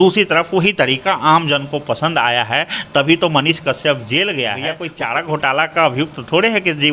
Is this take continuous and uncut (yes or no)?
no